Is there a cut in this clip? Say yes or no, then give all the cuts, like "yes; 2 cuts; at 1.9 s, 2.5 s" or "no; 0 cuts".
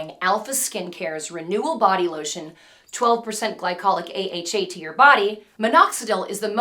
yes; 1 cut; at 5.5 s